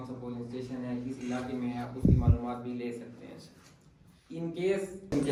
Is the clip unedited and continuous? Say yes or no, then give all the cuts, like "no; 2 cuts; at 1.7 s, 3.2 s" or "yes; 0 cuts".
yes; 0 cuts